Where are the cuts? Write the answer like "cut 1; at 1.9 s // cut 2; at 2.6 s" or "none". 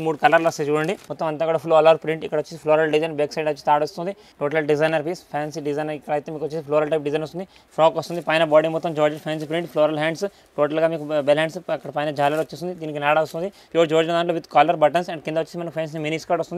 cut 1; at 1.1 s // cut 2; at 4.2 s // cut 3; at 7.6 s // cut 4; at 13.6 s

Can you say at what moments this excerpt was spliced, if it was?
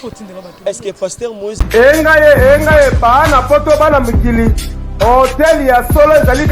cut 1; at 1.6 s

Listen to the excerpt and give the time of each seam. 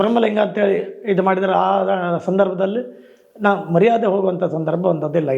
none

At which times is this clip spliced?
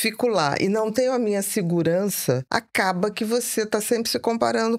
cut 1; at 2.4 s

